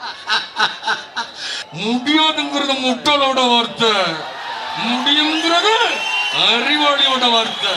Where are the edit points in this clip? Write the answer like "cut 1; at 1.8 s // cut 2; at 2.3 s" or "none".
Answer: cut 1; at 1.5 s